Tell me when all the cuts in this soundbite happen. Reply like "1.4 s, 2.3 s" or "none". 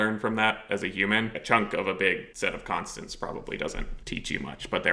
1.4 s, 2.3 s, 3.9 s